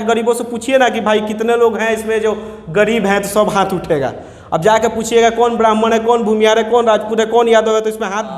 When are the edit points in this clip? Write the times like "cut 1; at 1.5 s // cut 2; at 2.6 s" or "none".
none